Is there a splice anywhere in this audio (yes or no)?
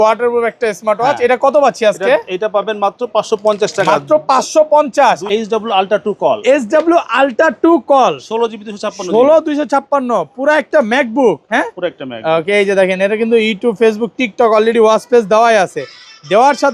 yes